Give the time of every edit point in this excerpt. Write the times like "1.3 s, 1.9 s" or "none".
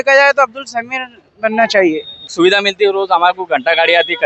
2.2 s